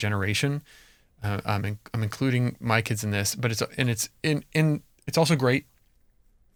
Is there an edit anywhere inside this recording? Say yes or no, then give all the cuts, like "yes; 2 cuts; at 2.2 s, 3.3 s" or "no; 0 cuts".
no; 0 cuts